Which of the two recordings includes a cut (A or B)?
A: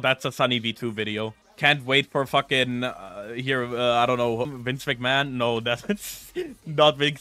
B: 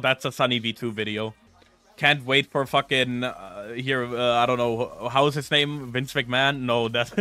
A